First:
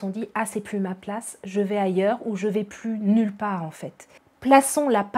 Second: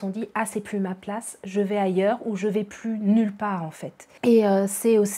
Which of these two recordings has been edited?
first; 1 cut; at 4.1 s

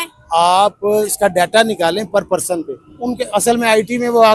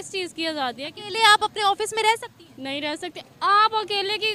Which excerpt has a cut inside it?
first; 2 cuts; at 1.1 s, 2.8 s

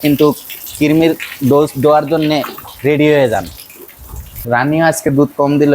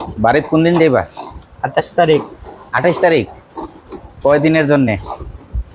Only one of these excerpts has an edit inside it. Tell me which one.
first; 1 cut; at 4.3 s

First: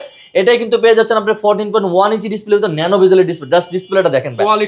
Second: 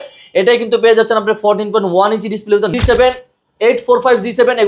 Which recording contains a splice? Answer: second; 1 cut; at 2.7 s

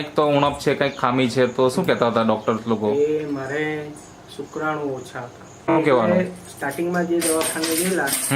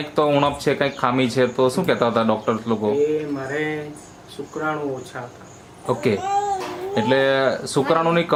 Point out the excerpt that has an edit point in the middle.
first; 1 cut; at 5.7 s

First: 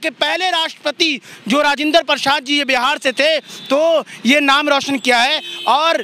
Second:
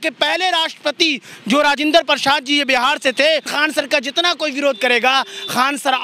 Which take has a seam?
second; 1 cut; at 3.5 s

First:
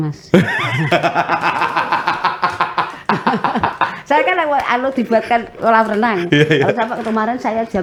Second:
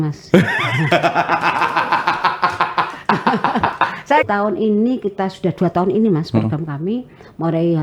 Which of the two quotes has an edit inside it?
second; 1 cut; at 4.2 s

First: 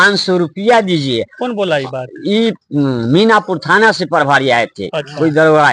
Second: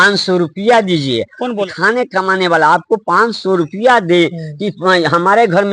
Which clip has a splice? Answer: second; 1 cut; at 1.7 s

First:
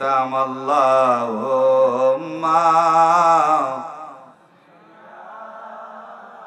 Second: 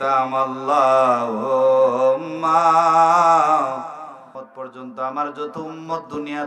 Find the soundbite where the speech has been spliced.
second; 1 cut; at 4.3 s

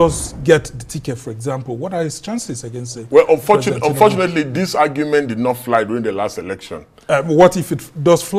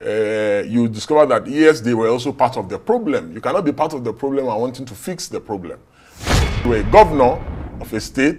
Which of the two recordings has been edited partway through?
second; 1 cut; at 6.3 s

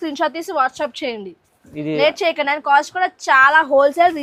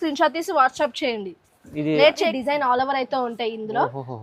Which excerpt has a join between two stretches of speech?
second; 1 cut; at 2.3 s

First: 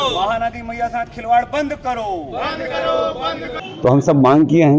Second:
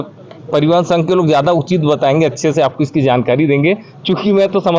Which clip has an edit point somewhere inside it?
first; 1 cut; at 3.6 s

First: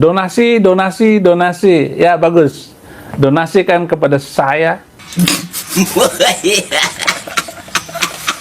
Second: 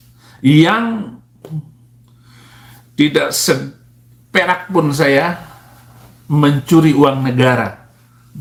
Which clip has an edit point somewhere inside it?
first; 1 cut; at 5.2 s

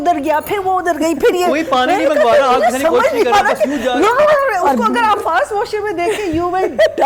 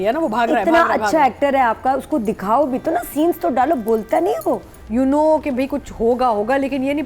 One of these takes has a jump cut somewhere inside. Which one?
second; 1 cut; at 4.7 s

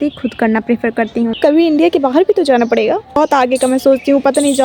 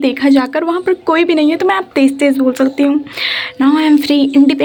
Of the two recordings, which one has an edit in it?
first; 2 cuts; at 1.3 s, 3.2 s

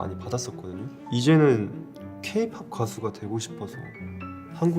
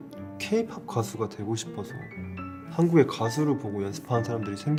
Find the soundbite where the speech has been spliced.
first; 1 cut; at 0.9 s

